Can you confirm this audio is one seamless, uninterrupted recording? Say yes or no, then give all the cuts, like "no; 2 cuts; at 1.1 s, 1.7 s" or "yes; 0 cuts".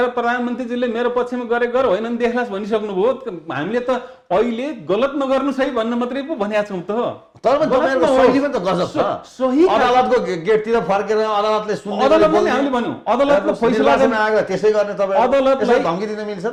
yes; 0 cuts